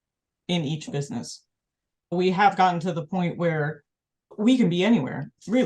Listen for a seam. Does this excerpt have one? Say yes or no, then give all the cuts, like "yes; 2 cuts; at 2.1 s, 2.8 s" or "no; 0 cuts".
yes; 2 cuts; at 2.1 s, 4.3 s